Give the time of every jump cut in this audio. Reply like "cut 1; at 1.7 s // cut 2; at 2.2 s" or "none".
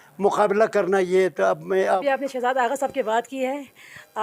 cut 1; at 2.0 s

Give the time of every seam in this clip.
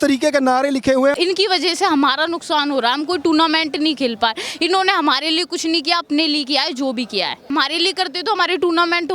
cut 1; at 1.1 s // cut 2; at 7.5 s

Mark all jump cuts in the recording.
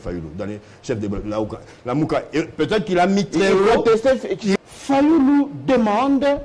cut 1; at 4.5 s

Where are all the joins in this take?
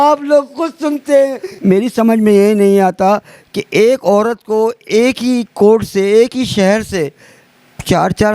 cut 1; at 1.4 s

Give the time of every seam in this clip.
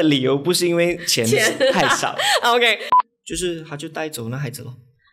cut 1; at 2.8 s

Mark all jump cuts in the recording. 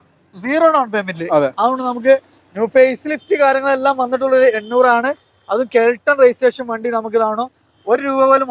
none

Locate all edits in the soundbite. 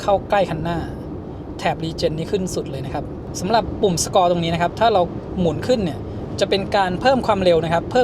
none

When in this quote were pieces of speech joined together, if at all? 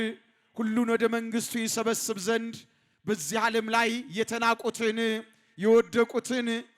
none

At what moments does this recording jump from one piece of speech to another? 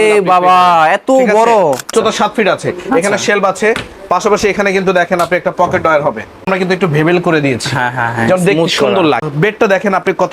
cut 1; at 1.9 s // cut 2; at 6.5 s // cut 3; at 9.3 s

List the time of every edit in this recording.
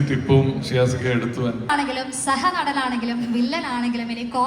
cut 1; at 1.7 s

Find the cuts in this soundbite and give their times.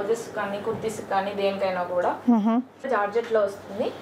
cut 1; at 2.8 s

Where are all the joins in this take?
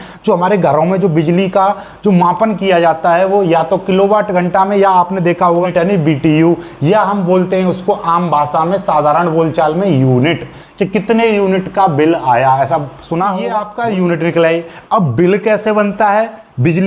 cut 1; at 5.7 s // cut 2; at 13.6 s

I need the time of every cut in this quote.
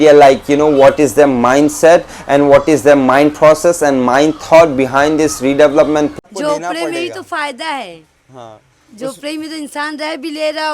cut 1; at 6.2 s

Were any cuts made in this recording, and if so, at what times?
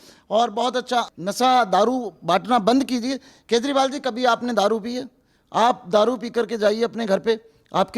cut 1; at 1.1 s

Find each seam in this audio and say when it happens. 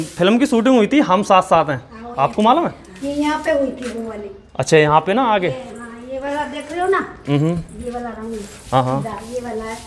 cut 1; at 3.0 s

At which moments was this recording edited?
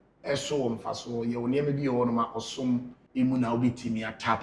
cut 1; at 3.0 s

